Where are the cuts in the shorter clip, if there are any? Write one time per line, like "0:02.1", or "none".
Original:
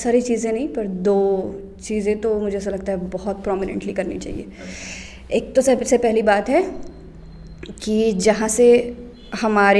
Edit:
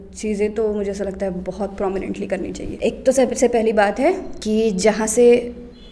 0:02.7
0:04.3